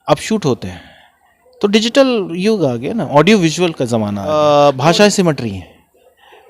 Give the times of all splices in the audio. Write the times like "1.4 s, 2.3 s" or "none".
4.3 s